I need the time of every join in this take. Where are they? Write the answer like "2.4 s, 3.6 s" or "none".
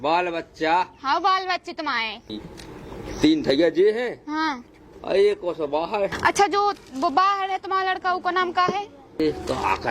2.4 s, 6.1 s, 9.2 s